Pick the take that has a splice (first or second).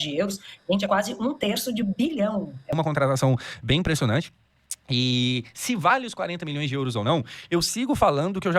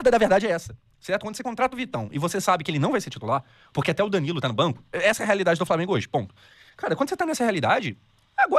first